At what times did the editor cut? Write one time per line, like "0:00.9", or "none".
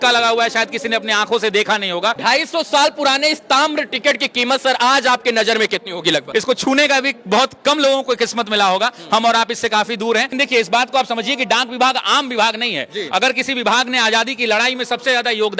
0:02.2
0:06.3
0:10.3